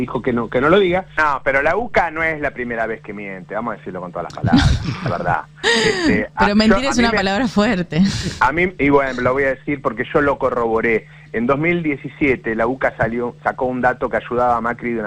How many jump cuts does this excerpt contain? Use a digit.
1